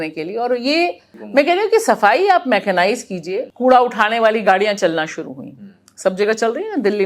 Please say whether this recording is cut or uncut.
cut